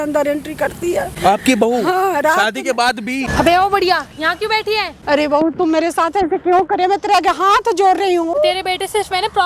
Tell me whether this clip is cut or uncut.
cut